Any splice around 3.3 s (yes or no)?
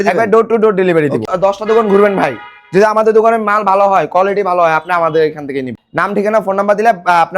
no